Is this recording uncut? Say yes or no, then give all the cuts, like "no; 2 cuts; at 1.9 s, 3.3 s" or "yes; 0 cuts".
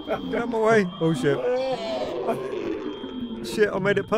yes; 0 cuts